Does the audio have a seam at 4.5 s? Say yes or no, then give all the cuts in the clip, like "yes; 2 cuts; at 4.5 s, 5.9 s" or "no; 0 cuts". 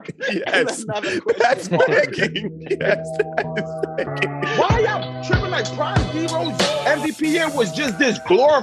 yes; 1 cut; at 4.5 s